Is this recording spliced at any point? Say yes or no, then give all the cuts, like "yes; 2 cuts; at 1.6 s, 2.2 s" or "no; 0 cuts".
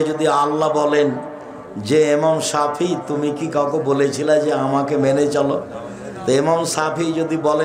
no; 0 cuts